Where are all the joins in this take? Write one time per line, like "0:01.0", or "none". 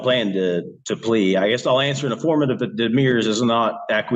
none